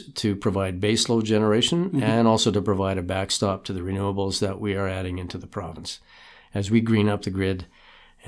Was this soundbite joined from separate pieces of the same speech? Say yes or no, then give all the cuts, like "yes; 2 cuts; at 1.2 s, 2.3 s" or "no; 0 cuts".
no; 0 cuts